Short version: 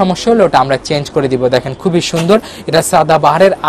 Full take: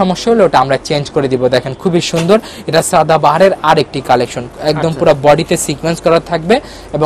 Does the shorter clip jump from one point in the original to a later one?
no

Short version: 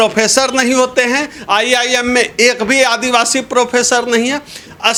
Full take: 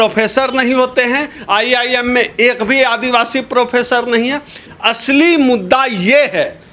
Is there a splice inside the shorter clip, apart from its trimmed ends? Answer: no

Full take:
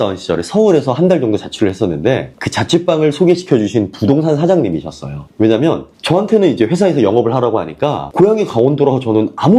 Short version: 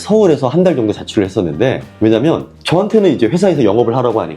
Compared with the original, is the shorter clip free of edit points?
no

